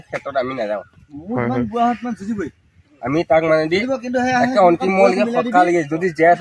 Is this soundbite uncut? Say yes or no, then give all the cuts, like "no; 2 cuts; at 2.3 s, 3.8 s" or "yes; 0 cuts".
yes; 0 cuts